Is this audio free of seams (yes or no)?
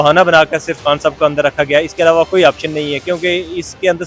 yes